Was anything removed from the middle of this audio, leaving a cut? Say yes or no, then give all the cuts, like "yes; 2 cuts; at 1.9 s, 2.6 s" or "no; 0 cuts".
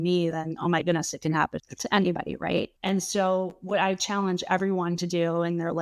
yes; 2 cuts; at 1.7 s, 2.7 s